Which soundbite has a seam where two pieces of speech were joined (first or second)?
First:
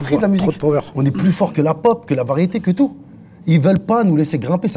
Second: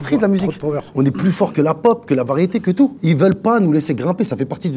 second